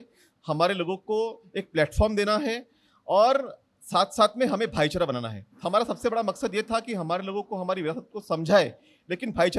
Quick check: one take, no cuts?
yes; 0 cuts

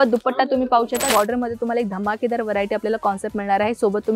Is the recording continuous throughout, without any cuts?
no; 1 cut; at 1.1 s

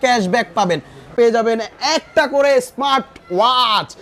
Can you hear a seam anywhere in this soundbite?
yes; 1 cut; at 1.1 s

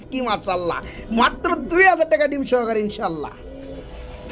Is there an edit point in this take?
no; 0 cuts

